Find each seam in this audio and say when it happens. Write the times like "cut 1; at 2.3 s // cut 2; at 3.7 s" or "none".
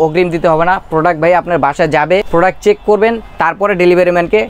cut 1; at 2.3 s